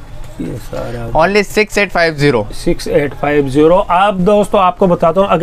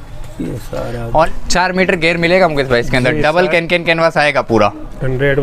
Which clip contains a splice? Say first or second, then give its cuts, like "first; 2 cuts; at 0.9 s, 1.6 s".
second; 1 cut; at 1.0 s